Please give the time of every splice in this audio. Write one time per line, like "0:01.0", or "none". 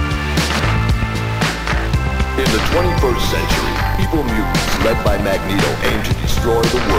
none